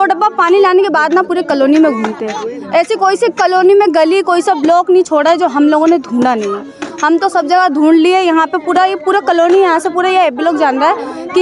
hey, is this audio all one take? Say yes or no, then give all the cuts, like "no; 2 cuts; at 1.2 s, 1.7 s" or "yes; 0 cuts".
yes; 0 cuts